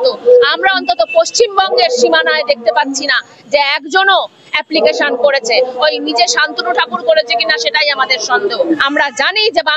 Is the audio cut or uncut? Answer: cut